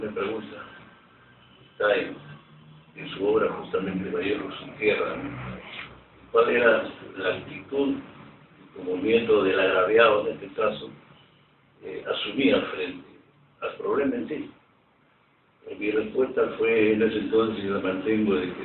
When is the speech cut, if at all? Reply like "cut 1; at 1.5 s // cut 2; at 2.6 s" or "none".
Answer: cut 1; at 11.7 s